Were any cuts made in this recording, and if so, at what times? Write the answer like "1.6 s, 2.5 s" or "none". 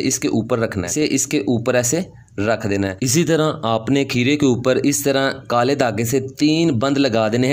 0.9 s, 3.1 s